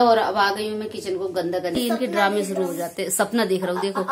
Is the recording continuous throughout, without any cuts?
no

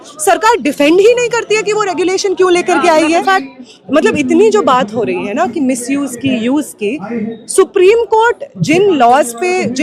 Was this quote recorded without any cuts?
no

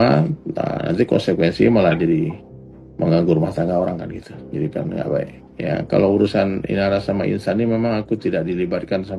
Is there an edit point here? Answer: no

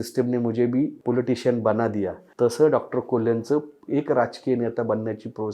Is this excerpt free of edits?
no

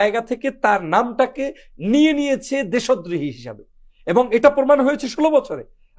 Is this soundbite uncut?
yes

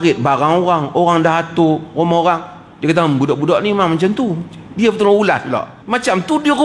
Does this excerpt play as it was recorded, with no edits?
no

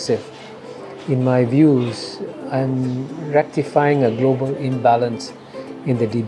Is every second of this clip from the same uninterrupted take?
yes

